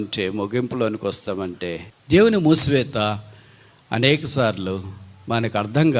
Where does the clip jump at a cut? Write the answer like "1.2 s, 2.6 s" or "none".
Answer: 1.9 s